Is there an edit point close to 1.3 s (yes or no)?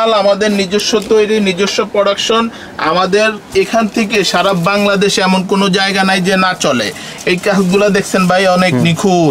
no